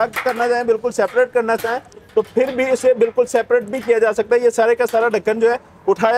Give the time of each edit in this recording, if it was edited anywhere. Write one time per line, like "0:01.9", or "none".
none